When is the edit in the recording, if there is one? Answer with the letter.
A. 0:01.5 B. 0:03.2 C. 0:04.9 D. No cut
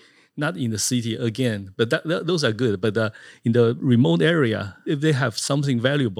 C